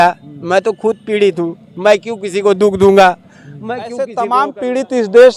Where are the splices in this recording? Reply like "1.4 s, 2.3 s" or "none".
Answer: 3.9 s